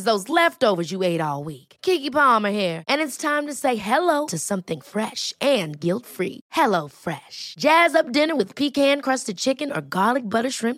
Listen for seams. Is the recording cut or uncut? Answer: uncut